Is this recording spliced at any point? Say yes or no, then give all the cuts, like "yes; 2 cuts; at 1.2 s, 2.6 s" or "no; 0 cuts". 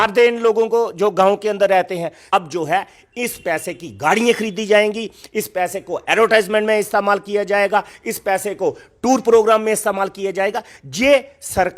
yes; 1 cut; at 2.3 s